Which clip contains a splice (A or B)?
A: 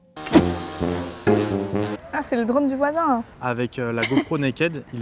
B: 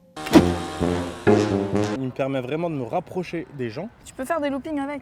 A